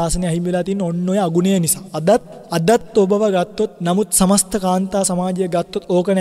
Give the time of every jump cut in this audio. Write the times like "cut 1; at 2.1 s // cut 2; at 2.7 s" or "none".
cut 1; at 2.4 s // cut 2; at 3.7 s

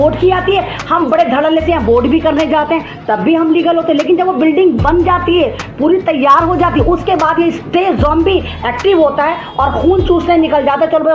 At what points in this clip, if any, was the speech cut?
none

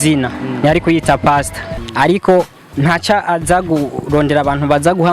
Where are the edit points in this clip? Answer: cut 1; at 1.8 s

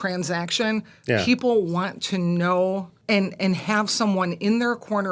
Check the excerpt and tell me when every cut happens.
cut 1; at 2.9 s

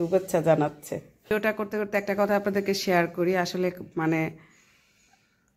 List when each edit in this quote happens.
cut 1; at 1.3 s

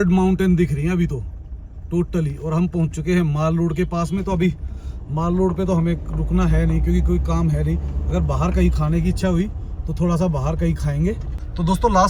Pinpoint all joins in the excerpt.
none

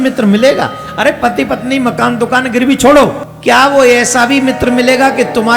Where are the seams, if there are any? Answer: cut 1; at 3.3 s

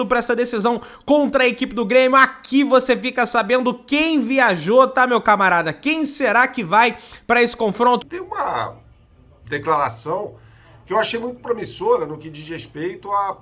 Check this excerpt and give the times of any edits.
cut 1; at 8.0 s

